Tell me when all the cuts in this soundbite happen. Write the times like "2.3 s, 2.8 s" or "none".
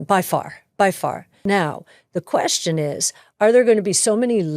1.3 s